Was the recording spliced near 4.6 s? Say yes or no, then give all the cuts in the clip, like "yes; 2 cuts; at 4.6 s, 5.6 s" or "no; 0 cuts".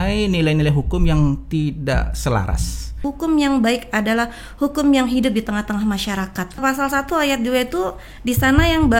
no; 2 cuts; at 3.0 s, 6.6 s